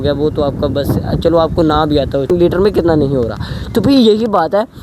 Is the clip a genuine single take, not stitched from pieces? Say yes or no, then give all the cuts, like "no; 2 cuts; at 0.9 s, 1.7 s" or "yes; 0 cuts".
no; 1 cut; at 2.3 s